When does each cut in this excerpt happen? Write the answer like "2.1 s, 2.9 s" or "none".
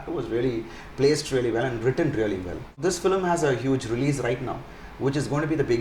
2.8 s